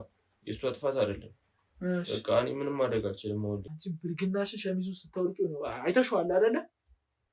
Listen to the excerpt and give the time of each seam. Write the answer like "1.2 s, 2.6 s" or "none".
3.7 s